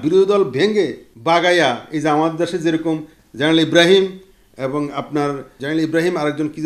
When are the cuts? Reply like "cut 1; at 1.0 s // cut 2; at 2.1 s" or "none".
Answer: cut 1; at 1.1 s // cut 2; at 5.5 s